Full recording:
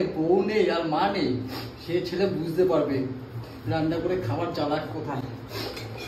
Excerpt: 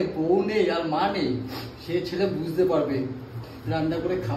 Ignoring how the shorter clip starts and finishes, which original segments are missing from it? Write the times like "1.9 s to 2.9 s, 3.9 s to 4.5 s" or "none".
none